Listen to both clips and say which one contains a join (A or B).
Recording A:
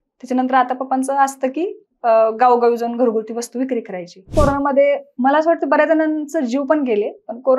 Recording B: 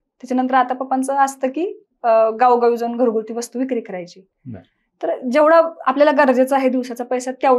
A